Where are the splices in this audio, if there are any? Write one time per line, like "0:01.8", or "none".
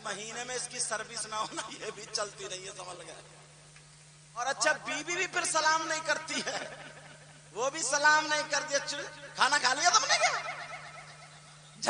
0:04.4